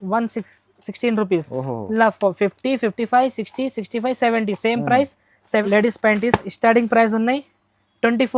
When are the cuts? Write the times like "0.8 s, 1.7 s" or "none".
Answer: 5.6 s